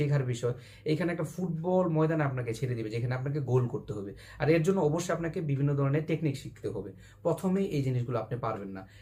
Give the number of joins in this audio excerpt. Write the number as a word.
zero